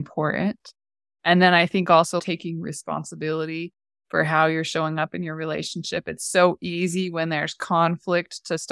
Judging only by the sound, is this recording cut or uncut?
cut